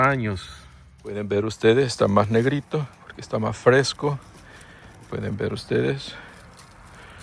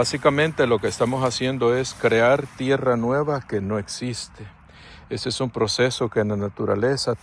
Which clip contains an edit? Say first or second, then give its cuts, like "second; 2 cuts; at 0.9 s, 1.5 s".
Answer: first; 1 cut; at 1.2 s